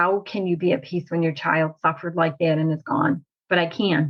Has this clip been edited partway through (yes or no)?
no